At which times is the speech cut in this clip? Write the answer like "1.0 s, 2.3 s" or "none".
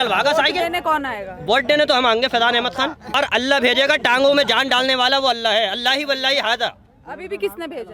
3.2 s